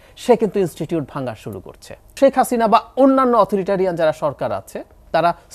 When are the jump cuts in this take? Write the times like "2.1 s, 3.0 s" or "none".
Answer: 2.2 s